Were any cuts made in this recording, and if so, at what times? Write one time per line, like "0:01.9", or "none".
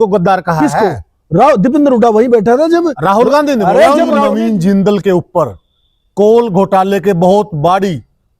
0:04.3